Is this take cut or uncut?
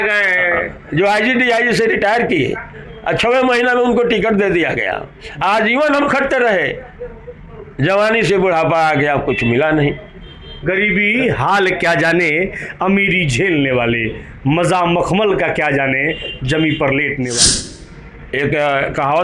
cut